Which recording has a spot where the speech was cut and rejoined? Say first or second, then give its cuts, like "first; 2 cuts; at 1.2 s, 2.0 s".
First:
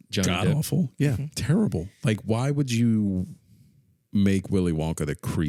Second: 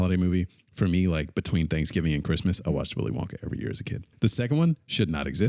second; 1 cut; at 4.1 s